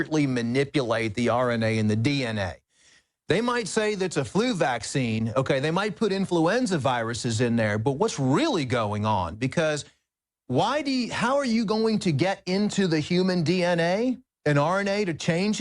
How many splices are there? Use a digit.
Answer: 0